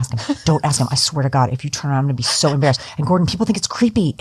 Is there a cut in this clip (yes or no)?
no